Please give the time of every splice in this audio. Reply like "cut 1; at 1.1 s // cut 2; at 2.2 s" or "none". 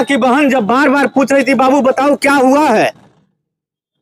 none